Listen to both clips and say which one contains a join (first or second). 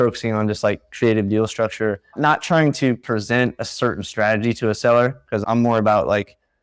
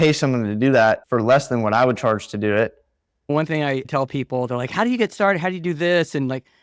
second